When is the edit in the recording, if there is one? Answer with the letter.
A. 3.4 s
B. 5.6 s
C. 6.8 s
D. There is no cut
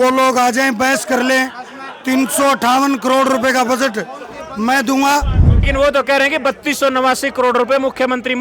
B